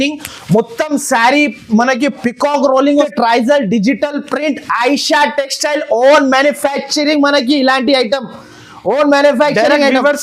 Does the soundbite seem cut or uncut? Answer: cut